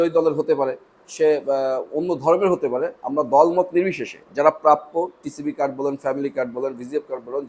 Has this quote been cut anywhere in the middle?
no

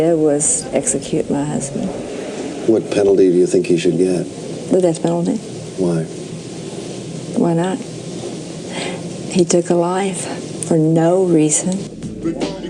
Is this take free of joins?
no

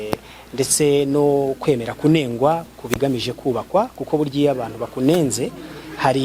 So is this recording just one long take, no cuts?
yes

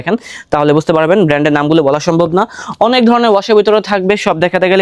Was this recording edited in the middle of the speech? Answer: no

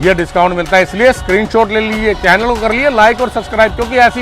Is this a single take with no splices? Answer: yes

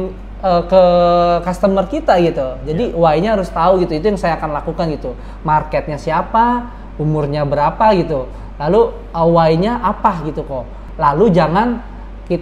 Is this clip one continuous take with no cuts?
no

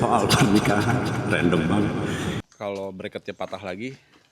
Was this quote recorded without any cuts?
no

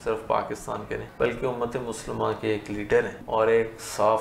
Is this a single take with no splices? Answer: no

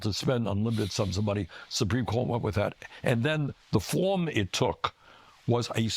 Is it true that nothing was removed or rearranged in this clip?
no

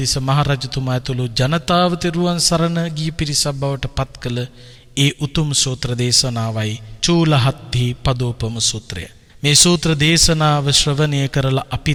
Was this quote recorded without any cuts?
yes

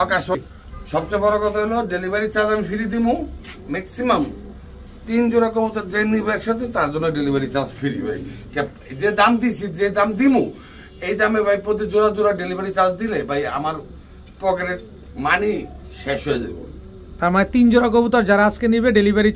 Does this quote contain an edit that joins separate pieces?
no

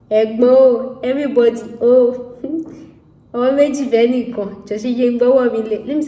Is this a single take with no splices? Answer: yes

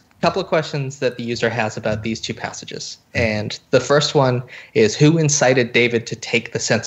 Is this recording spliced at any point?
no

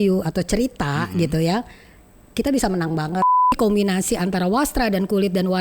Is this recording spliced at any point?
yes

